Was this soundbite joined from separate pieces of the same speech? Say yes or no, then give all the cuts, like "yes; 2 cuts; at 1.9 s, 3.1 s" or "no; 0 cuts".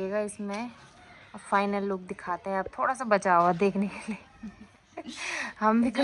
no; 0 cuts